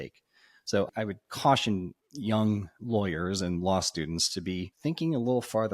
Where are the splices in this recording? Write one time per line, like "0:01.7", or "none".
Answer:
0:04.7